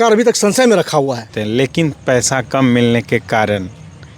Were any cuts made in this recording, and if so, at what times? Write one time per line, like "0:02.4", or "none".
0:01.3